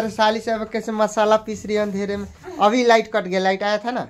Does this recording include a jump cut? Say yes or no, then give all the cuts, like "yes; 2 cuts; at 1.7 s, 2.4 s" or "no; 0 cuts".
no; 0 cuts